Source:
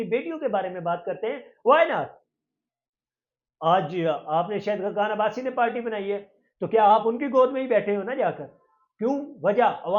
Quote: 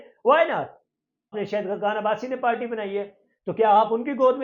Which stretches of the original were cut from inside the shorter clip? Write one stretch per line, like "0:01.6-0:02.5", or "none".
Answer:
0:02.7-0:04.5